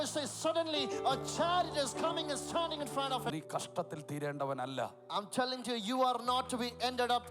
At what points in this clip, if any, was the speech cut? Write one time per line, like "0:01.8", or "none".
0:03.3